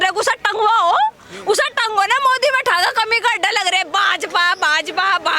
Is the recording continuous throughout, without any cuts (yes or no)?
yes